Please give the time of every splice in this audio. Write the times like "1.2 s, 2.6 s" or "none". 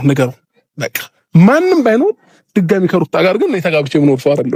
none